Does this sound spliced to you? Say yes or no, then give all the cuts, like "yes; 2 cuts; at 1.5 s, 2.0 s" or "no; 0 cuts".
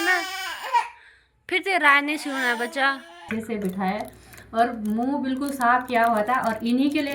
yes; 1 cut; at 3.3 s